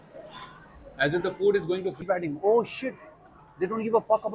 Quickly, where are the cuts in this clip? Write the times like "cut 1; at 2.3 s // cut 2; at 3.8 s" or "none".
cut 1; at 2.0 s